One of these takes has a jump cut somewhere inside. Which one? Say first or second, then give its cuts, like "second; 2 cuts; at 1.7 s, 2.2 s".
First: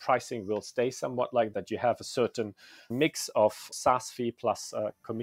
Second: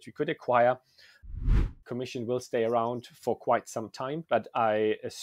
second; 2 cuts; at 1.6 s, 4.2 s